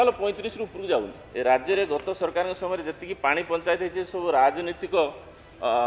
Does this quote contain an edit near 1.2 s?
yes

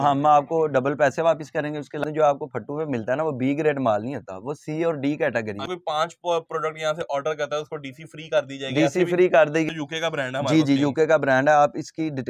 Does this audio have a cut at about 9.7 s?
yes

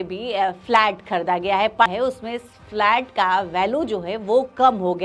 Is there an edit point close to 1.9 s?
yes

